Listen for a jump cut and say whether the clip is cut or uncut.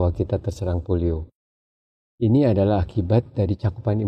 uncut